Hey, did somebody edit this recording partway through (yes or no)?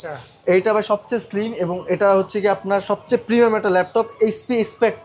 no